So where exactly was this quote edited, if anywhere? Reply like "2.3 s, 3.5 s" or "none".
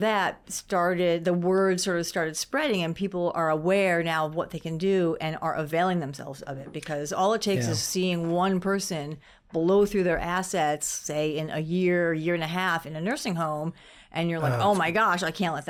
none

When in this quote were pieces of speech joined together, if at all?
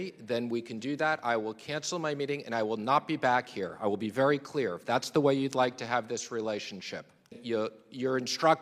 7.4 s

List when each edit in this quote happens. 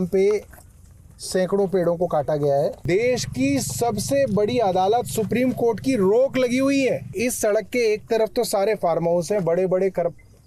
2.8 s, 7.1 s

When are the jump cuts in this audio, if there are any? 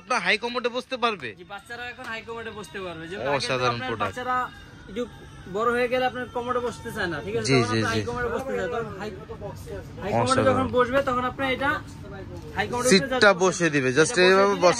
none

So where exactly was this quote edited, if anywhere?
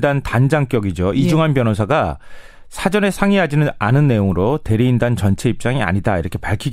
3.2 s

